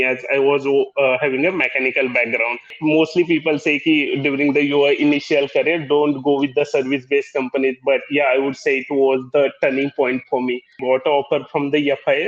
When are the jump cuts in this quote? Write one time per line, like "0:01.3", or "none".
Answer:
0:02.7
0:10.7